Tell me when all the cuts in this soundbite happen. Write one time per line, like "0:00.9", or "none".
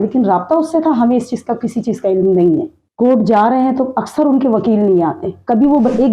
0:02.8